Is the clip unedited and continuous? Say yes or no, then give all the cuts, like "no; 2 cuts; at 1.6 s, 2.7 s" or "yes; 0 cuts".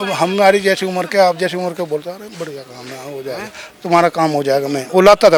yes; 0 cuts